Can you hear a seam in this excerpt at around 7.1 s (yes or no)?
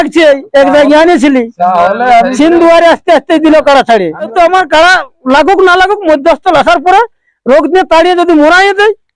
no